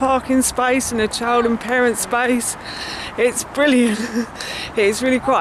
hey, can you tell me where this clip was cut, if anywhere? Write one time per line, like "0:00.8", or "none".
none